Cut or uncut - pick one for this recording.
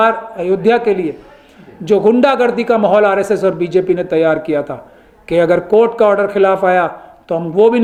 uncut